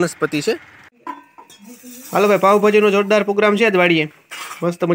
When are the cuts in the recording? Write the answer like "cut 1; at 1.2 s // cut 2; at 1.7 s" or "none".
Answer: cut 1; at 1.0 s

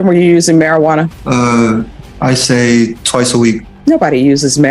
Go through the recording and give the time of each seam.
cut 1; at 1.2 s // cut 2; at 2.0 s // cut 3; at 3.7 s

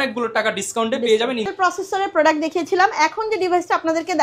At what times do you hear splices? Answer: none

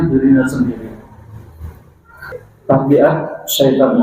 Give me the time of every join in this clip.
cut 1; at 2.4 s

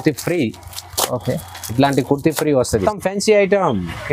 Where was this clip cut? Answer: cut 1; at 2.8 s

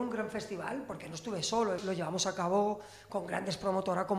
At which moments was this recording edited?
cut 1; at 1.8 s

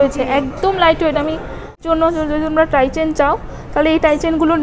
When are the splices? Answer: cut 1; at 1.8 s

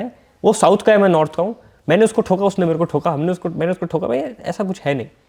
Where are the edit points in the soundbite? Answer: none

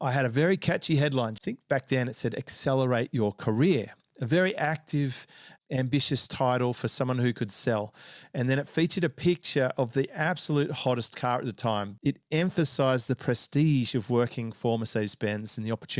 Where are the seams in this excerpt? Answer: cut 1; at 1.4 s // cut 2; at 11.9 s

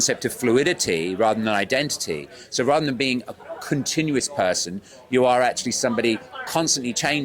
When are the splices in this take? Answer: none

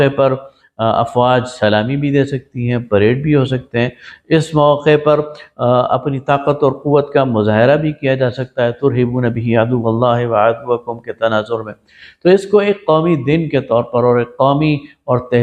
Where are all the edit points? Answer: none

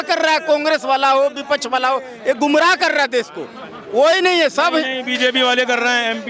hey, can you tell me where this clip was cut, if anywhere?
none

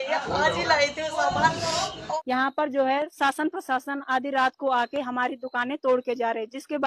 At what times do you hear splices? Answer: cut 1; at 2.0 s

